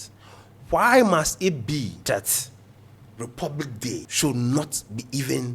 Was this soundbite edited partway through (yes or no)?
yes